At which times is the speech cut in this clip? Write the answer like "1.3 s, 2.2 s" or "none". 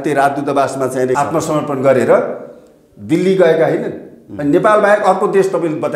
1.2 s